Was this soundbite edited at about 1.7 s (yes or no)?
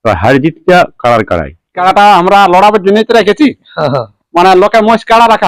yes